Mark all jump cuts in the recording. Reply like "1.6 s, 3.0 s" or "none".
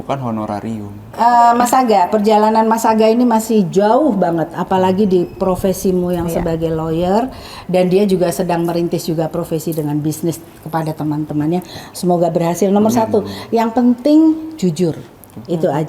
1.1 s

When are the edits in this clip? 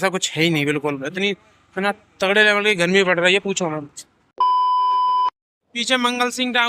4.3 s, 5.5 s

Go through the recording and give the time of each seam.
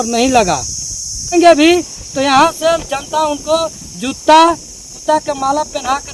1.4 s

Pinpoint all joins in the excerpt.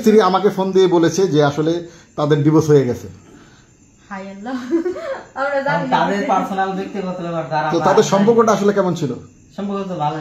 none

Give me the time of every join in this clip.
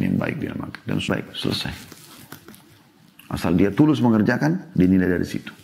1.1 s

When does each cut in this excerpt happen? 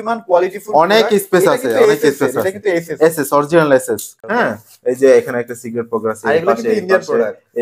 4.1 s

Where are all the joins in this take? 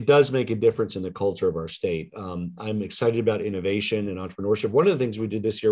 none

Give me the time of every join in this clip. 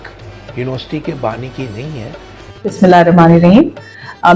2.4 s

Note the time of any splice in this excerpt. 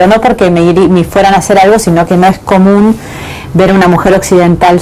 1.3 s

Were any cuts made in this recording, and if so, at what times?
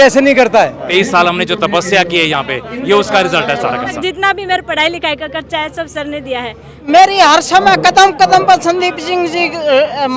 0.8 s, 4.0 s, 6.8 s

